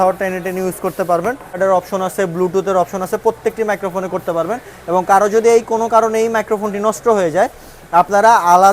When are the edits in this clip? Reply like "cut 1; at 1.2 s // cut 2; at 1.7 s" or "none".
cut 1; at 1.6 s